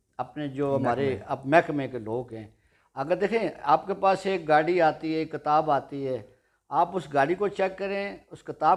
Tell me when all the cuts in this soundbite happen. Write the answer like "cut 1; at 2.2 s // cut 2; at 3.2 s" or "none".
none